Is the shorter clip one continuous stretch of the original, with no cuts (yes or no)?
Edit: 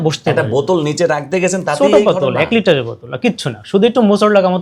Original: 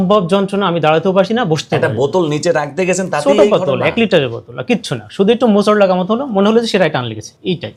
yes